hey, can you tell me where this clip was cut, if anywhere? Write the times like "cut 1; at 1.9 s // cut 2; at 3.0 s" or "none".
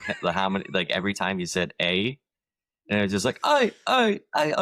none

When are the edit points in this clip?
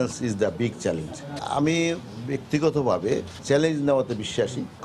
none

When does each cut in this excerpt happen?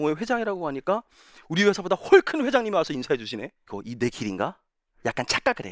cut 1; at 3.6 s

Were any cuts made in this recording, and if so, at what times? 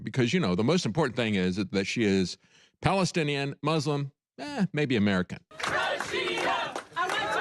cut 1; at 5.4 s

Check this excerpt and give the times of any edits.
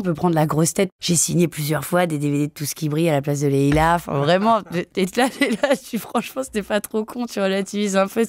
cut 1; at 1.0 s

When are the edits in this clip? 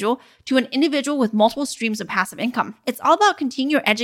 cut 1; at 2.8 s

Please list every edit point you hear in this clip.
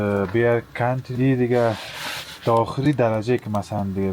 cut 1; at 1.1 s

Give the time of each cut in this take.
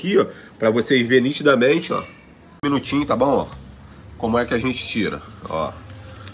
cut 1; at 2.6 s

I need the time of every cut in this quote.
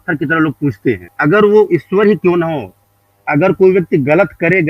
cut 1; at 1.1 s

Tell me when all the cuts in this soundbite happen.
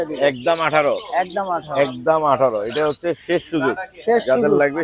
none

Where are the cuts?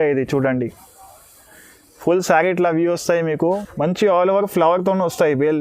cut 1; at 3.4 s

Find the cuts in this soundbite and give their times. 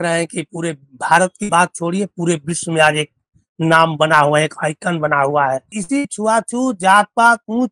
cut 1; at 5.8 s

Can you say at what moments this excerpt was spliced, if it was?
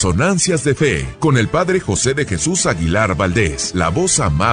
cut 1; at 1.1 s // cut 2; at 3.6 s

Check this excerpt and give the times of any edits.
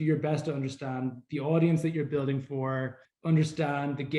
cut 1; at 3.0 s

